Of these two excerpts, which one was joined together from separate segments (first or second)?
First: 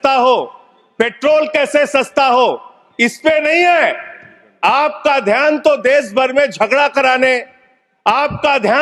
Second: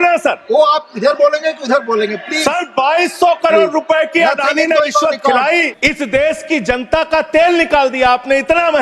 second